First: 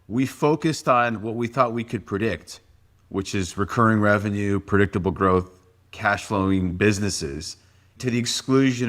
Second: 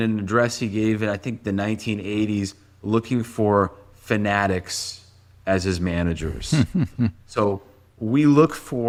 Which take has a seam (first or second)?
first